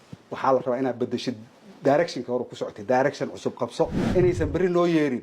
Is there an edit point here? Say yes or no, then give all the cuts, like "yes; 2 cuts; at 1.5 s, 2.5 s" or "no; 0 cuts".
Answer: yes; 1 cut; at 4.0 s